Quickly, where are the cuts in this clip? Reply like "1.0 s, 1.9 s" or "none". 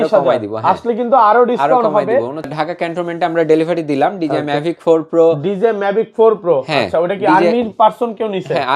2.5 s